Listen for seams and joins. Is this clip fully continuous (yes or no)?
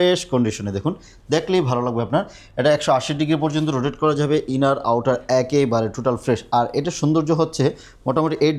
yes